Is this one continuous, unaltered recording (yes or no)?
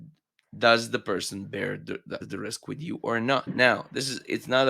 no